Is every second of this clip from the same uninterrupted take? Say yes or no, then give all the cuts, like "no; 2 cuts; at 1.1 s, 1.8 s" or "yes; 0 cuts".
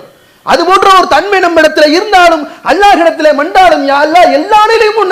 yes; 0 cuts